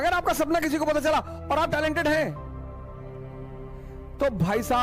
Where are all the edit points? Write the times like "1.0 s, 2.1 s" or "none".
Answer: none